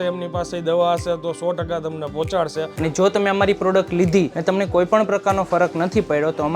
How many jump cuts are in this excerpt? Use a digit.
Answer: 2